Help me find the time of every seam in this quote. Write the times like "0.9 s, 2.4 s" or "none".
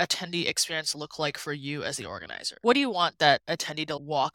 none